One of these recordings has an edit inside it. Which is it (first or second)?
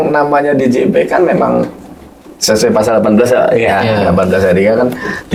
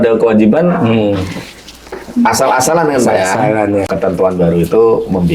second